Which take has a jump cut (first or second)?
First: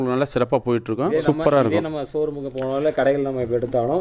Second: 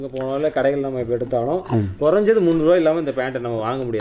first